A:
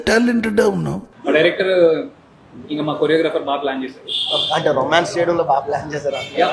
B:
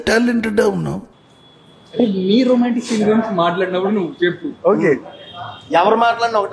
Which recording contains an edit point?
A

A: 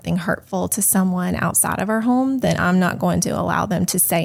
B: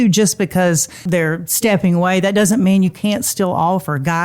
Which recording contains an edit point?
B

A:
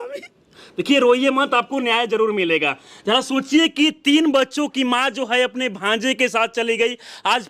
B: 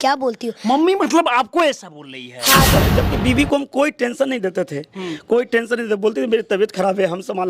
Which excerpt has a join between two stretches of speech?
B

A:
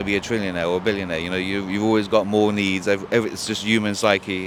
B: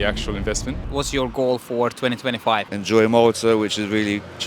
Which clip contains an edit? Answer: B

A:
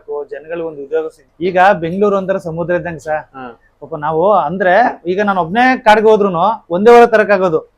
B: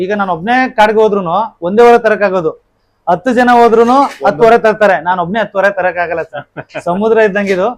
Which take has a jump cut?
A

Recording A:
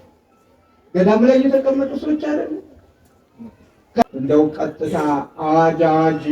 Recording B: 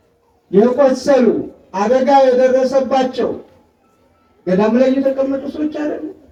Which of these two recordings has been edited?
A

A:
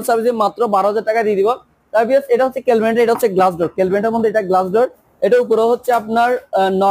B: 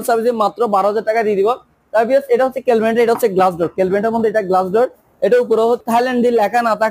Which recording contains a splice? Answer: B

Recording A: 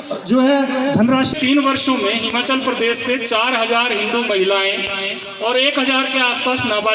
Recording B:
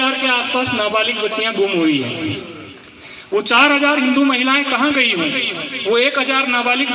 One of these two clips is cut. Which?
A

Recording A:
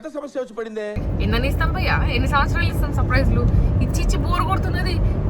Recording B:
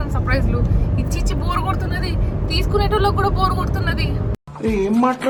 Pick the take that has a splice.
A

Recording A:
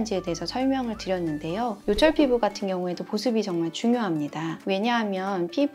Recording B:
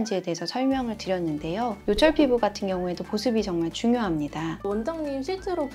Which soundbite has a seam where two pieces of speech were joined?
B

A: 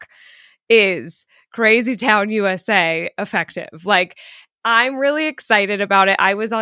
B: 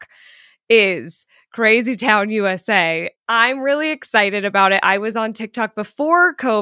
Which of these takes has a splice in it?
B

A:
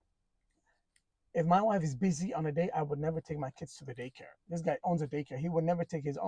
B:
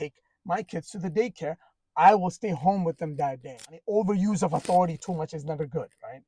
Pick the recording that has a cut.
B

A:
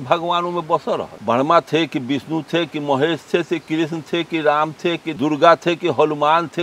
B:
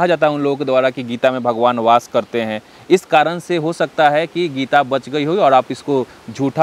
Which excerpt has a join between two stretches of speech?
A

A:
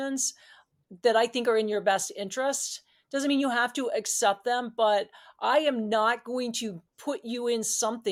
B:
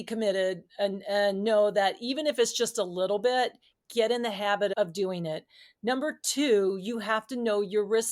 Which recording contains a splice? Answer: B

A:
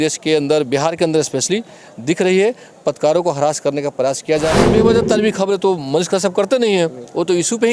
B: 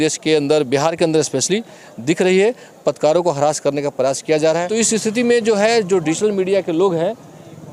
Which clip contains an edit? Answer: A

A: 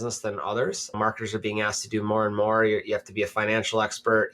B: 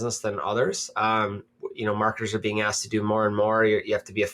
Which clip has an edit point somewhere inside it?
A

